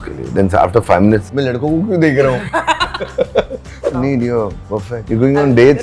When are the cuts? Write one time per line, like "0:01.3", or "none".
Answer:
0:01.3
0:03.9
0:05.0